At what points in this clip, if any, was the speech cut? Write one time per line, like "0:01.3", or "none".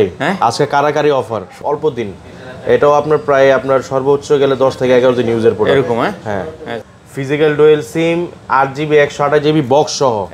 0:01.6
0:06.8